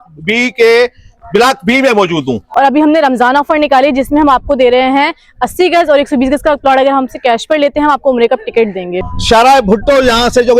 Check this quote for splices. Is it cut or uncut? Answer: cut